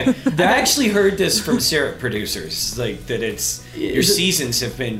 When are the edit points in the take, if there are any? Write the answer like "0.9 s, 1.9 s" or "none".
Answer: none